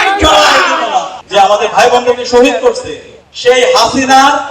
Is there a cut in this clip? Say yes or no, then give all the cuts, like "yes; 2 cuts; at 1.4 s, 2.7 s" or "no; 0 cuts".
yes; 1 cut; at 1.2 s